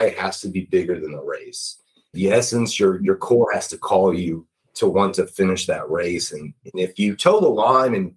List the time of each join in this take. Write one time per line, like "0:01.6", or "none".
0:02.1